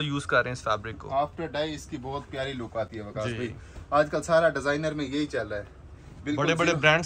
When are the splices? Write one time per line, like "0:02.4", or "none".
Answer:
none